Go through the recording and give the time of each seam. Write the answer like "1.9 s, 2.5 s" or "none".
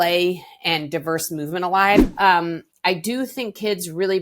2.1 s